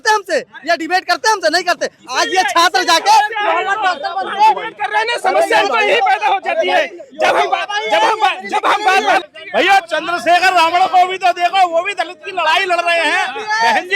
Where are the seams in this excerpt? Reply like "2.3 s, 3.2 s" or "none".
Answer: 9.3 s